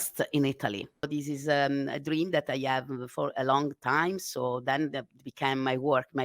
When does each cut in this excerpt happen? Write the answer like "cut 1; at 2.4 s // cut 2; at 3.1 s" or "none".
cut 1; at 1.1 s